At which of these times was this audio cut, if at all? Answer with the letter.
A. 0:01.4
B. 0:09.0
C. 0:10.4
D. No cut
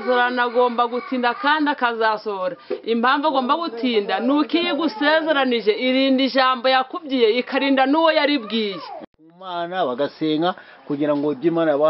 B